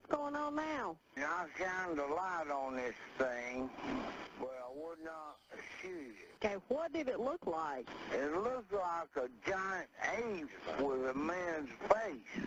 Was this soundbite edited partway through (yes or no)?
no